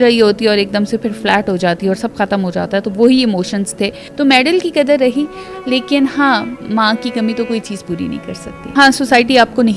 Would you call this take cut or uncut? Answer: cut